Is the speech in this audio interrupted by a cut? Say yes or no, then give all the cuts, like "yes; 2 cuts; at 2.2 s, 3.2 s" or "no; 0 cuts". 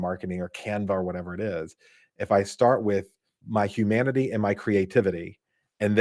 no; 0 cuts